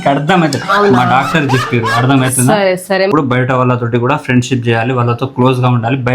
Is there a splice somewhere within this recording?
yes; 1 cut; at 3.1 s

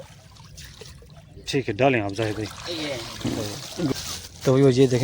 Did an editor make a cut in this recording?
yes; 1 cut; at 3.9 s

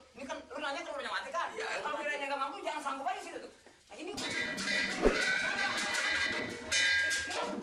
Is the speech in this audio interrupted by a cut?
no; 0 cuts

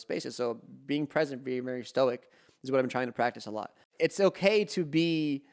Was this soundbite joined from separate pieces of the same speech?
yes; 1 cut; at 3.9 s

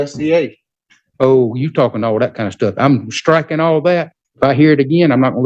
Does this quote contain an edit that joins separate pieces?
yes; 1 cut; at 4.2 s

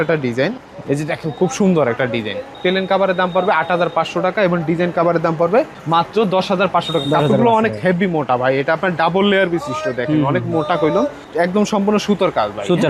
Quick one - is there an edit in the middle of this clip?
no; 0 cuts

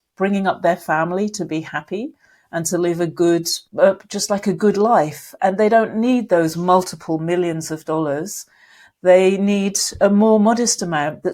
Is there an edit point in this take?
yes; 1 cut; at 3.6 s

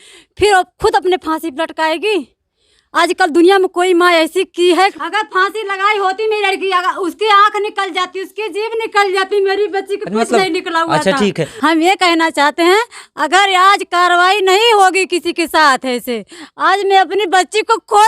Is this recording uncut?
no; 2 cuts; at 4.9 s, 11.4 s

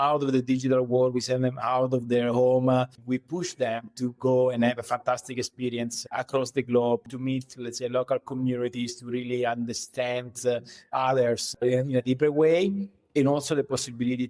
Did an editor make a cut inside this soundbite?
yes; 3 cuts; at 3.0 s, 7.1 s, 11.6 s

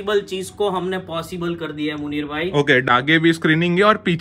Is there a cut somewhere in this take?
yes; 1 cut; at 2.9 s

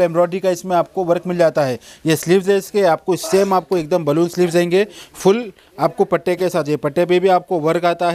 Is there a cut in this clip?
no; 0 cuts

